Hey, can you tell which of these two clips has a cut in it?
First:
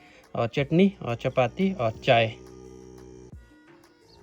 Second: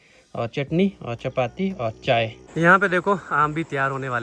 second; 1 cut; at 2.4 s

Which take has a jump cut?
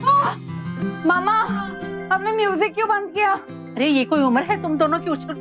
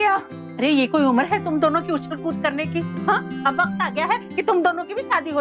second; 1 cut; at 3.3 s

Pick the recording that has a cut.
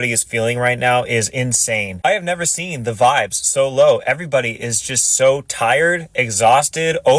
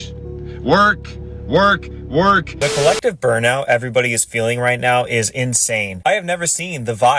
second; 1 cut; at 2.5 s

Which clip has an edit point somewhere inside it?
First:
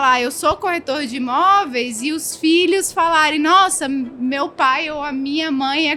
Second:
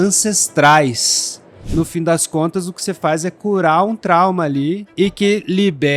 second; 2 cuts; at 1.5 s, 4.9 s

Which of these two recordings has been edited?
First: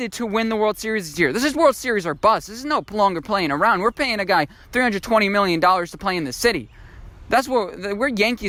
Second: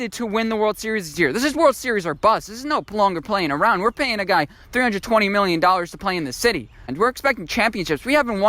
second; 1 cut; at 6.9 s

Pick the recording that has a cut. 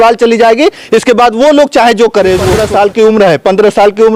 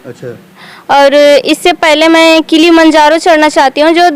first; 1 cut; at 2.6 s

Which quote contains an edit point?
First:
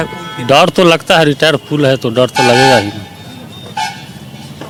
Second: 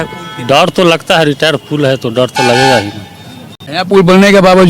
second; 1 cut; at 3.7 s

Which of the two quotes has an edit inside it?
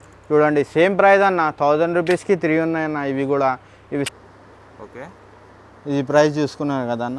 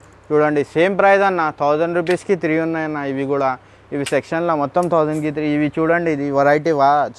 first; 1 cut; at 4.1 s

